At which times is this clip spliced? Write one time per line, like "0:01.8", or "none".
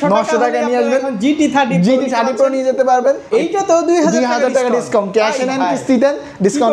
0:03.2